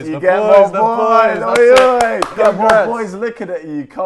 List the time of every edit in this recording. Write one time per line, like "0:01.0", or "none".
0:02.3